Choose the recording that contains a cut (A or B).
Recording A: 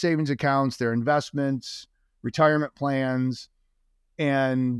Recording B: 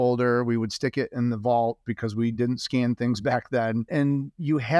B